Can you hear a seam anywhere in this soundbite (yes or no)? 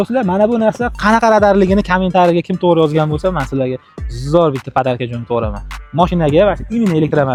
no